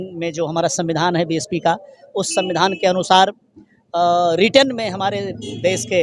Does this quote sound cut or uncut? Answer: uncut